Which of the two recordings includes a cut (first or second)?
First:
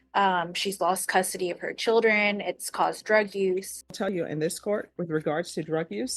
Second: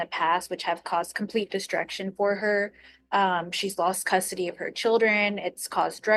first